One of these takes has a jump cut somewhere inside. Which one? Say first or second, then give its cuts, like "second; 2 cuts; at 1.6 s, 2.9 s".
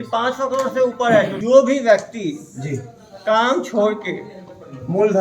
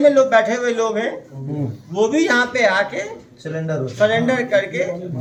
first; 1 cut; at 1.4 s